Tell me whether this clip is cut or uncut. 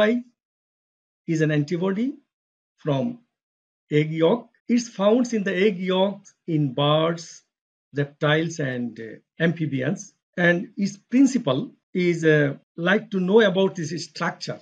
cut